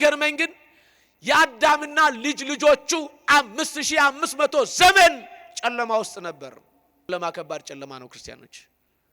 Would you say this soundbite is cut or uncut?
cut